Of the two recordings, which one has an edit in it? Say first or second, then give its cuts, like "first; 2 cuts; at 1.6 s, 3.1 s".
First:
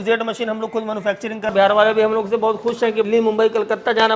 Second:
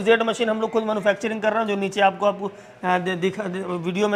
first; 2 cuts; at 1.5 s, 3.1 s